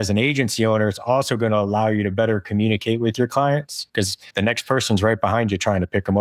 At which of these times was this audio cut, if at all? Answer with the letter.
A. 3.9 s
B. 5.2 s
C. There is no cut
A